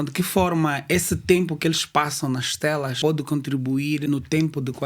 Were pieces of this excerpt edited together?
yes; 2 cuts; at 2.9 s, 4.0 s

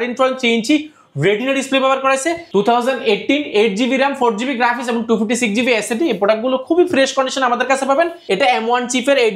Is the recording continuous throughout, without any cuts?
no; 2 cuts; at 2.4 s, 8.2 s

